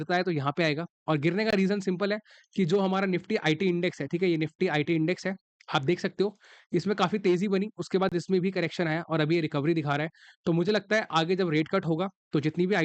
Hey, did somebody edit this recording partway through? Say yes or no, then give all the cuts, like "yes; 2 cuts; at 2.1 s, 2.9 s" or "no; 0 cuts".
no; 0 cuts